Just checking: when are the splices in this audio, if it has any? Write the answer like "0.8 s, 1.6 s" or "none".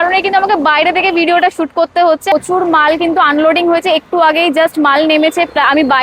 2.2 s